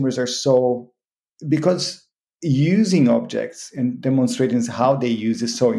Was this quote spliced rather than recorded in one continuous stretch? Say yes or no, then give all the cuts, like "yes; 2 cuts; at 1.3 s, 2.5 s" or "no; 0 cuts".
no; 0 cuts